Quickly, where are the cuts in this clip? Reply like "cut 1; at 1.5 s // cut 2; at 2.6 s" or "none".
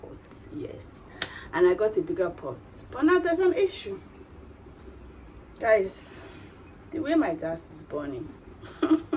none